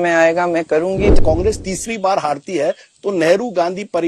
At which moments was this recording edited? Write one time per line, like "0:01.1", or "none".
0:01.2